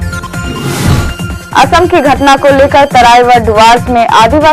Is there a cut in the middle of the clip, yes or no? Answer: yes